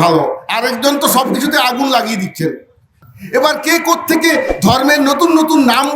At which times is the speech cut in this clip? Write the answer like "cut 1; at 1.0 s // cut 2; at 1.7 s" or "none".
cut 1; at 2.8 s